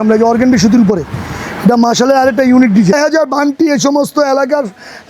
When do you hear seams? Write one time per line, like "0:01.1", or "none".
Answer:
0:02.9